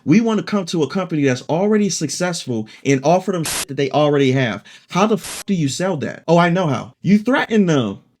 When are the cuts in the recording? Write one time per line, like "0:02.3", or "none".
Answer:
0:06.1
0:06.9